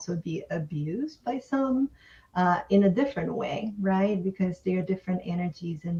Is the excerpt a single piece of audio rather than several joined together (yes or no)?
yes